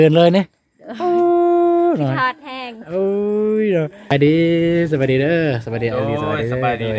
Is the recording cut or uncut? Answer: cut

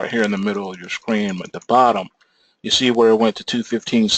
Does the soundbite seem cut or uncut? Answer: cut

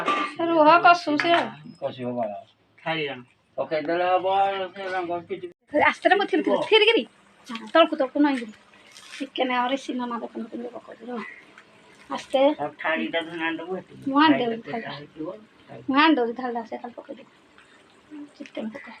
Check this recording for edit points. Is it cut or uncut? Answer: cut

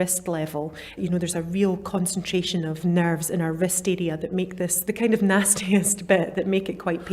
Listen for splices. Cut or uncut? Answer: cut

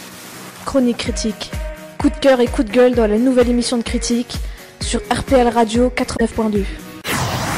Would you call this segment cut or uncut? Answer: cut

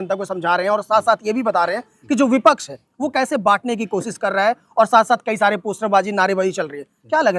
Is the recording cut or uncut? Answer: uncut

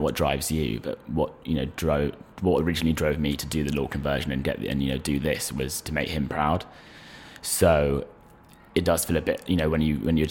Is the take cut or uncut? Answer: uncut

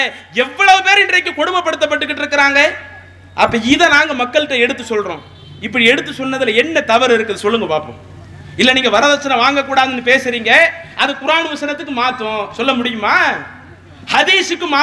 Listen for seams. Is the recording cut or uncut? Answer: uncut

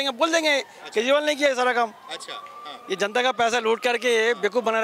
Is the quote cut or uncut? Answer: uncut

